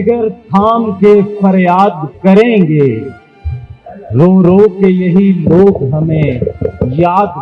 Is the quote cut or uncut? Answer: uncut